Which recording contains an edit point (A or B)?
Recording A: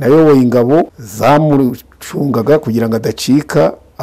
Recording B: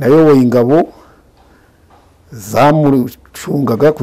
A